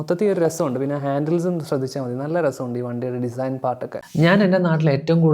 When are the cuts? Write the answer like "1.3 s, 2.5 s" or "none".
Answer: 4.0 s